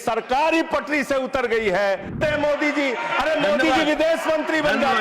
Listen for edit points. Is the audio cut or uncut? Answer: cut